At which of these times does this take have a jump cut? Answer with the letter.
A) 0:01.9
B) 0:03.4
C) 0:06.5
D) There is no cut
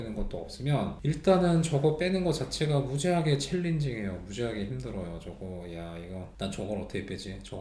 D